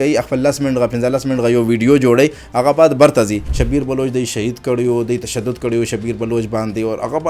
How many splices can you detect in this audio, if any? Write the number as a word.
one